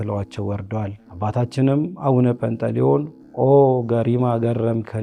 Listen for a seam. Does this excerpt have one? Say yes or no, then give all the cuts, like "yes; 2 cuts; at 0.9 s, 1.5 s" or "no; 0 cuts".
yes; 1 cut; at 1.0 s